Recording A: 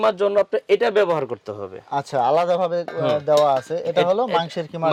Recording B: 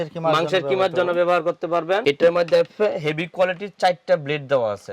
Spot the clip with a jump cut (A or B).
B